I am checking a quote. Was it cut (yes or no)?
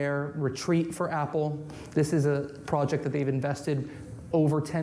no